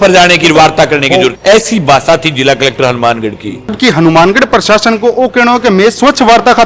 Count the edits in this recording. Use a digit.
2